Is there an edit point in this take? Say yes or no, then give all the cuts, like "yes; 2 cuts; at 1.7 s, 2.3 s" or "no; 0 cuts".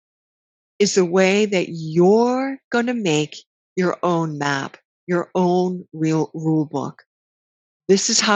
no; 0 cuts